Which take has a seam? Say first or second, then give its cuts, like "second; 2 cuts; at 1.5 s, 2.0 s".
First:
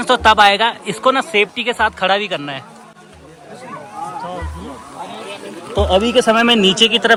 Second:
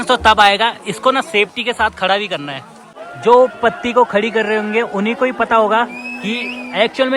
second; 1 cut; at 3.1 s